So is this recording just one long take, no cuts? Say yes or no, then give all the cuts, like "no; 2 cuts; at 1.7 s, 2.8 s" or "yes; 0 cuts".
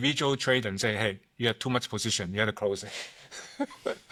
yes; 0 cuts